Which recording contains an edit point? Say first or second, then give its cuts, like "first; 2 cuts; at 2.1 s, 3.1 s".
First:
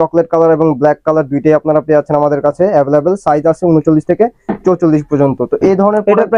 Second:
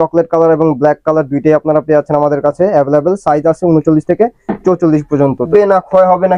second; 1 cut; at 5.5 s